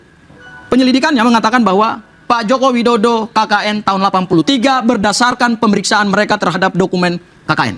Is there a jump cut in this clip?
no; 0 cuts

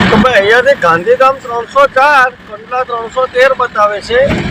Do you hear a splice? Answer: no; 0 cuts

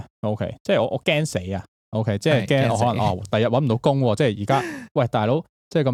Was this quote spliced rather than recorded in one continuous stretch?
no; 0 cuts

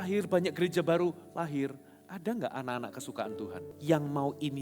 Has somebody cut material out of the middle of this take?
yes; 1 cut; at 3.7 s

